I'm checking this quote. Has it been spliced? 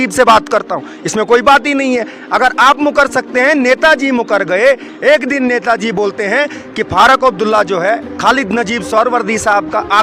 no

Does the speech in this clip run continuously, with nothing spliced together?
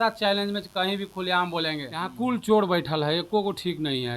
no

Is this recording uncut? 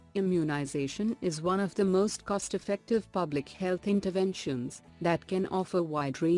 no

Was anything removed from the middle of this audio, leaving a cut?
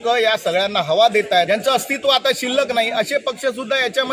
yes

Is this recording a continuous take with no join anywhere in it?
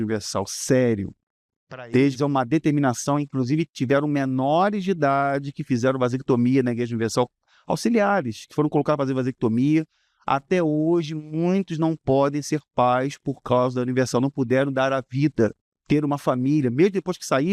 yes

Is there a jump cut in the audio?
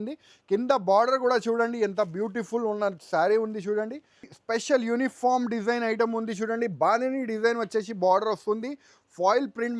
yes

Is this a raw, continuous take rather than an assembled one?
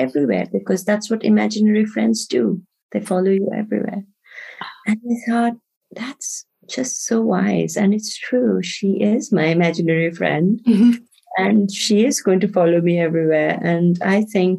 yes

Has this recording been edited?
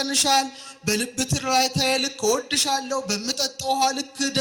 no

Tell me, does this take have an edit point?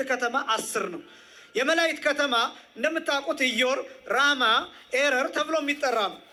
no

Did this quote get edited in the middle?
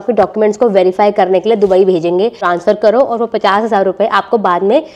yes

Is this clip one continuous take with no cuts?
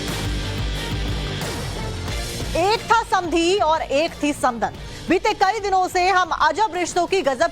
no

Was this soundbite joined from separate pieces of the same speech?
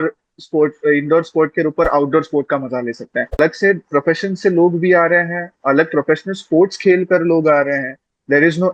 yes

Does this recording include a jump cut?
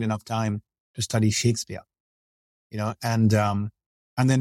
no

